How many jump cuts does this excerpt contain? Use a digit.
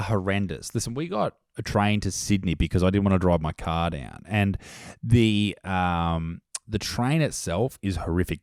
0